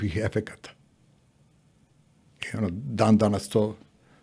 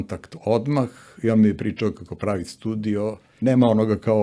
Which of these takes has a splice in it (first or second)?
second